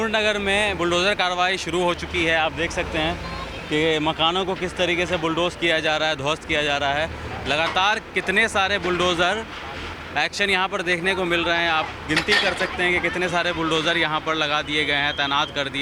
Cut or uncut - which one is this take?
uncut